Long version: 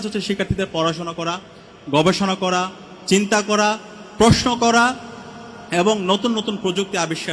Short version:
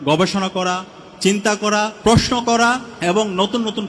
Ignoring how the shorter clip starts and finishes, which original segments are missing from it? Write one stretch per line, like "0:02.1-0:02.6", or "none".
0:03.8-0:04.1
0:05.0-0:05.6